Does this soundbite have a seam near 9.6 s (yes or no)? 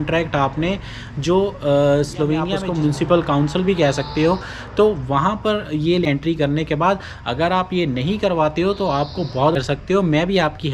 yes